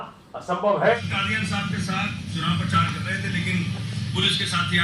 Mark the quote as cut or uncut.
cut